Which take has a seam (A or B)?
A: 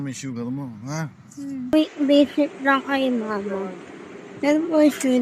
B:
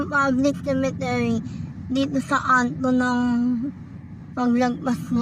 A